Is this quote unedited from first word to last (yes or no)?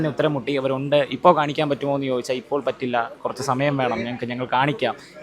yes